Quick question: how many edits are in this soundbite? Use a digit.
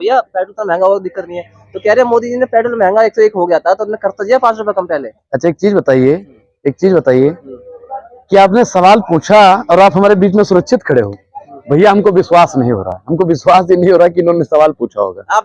0